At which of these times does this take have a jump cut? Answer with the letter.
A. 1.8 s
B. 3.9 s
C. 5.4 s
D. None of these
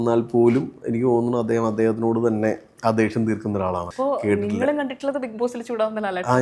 B